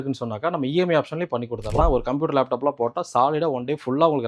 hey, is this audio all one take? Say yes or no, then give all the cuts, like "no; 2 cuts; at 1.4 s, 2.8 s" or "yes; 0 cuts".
no; 1 cut; at 1.8 s